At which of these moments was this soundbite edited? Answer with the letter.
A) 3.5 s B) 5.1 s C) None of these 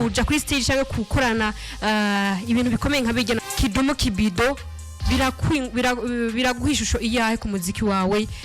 A